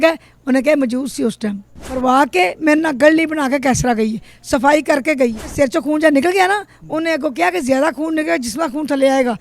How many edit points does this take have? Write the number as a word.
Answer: two